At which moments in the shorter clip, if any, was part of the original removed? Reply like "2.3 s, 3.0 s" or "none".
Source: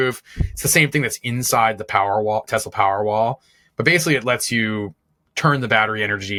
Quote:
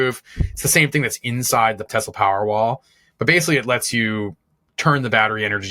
1.9 s